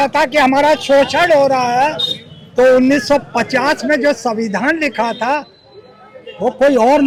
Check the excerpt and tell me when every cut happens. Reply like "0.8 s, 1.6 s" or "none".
none